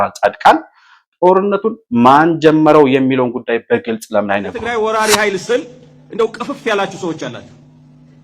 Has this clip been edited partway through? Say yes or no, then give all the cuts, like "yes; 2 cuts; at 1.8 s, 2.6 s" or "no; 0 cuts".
yes; 1 cut; at 4.6 s